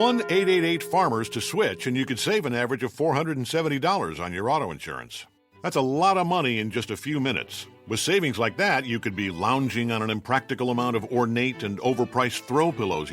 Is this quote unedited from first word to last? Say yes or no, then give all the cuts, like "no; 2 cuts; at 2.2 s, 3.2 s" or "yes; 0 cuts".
no; 1 cut; at 1.2 s